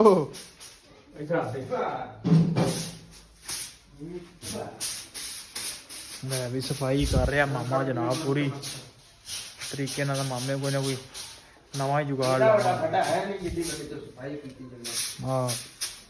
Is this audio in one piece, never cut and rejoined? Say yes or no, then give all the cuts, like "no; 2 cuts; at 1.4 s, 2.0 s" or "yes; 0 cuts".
yes; 0 cuts